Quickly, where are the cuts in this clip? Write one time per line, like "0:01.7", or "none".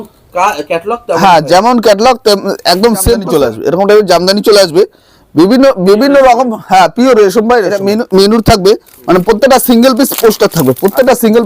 0:03.2
0:07.8